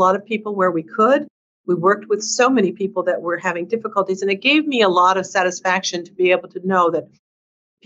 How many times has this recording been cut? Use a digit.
0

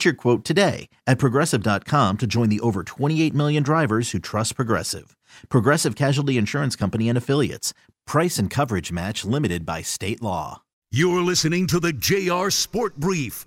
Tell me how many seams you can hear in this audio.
1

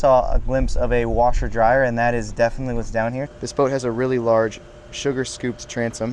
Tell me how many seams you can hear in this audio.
1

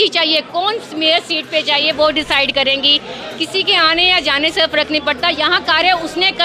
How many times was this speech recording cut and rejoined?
0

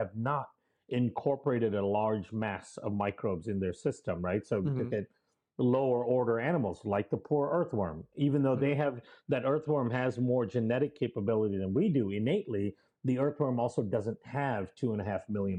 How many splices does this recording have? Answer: 0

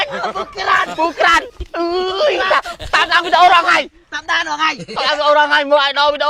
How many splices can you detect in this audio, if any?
0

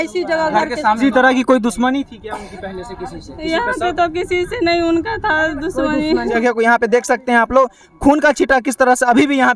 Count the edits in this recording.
2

